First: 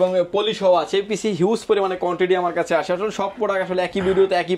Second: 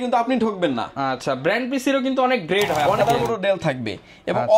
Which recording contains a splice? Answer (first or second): second